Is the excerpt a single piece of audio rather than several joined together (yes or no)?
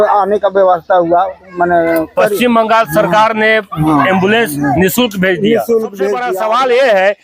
no